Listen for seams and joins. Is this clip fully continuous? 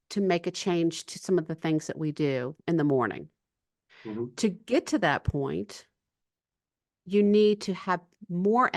yes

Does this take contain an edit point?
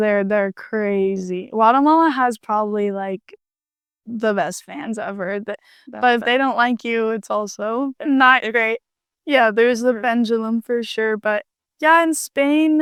no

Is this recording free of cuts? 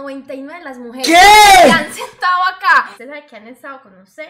no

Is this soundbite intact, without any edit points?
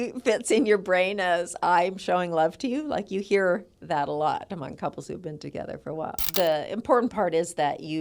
no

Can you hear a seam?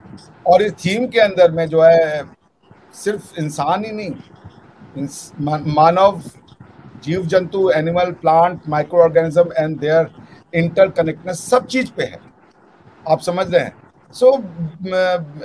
no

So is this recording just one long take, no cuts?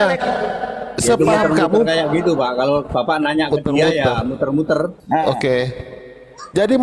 no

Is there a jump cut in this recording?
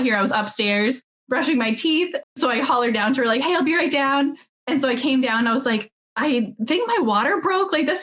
yes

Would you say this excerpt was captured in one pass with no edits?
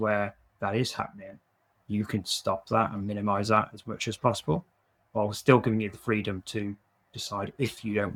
yes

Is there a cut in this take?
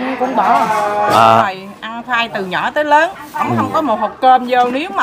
yes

